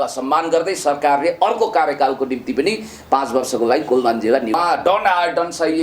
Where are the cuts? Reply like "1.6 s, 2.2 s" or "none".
4.6 s